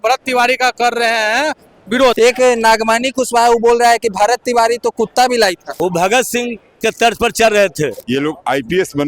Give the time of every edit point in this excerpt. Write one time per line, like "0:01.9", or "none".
0:02.2
0:05.7
0:08.0